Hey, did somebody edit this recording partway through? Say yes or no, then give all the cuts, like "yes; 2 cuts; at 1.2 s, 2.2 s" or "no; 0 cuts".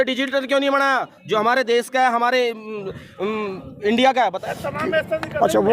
yes; 1 cut; at 4.4 s